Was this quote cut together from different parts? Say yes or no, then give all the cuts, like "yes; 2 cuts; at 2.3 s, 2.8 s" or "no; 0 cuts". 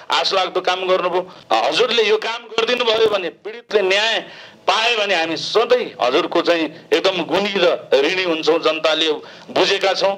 yes; 1 cut; at 1.4 s